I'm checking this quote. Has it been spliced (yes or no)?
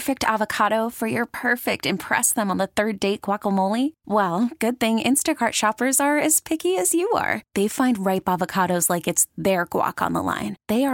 no